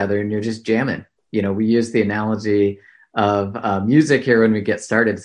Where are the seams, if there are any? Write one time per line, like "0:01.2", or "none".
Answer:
none